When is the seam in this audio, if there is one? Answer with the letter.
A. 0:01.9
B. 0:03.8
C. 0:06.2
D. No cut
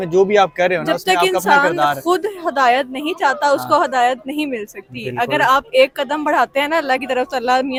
D